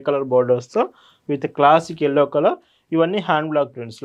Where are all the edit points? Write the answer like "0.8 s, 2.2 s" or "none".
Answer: none